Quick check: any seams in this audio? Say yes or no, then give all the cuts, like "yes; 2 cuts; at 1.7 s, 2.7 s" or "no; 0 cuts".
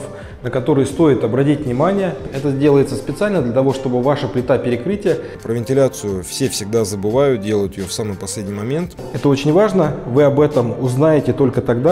yes; 3 cuts; at 2.2 s, 5.4 s, 9.0 s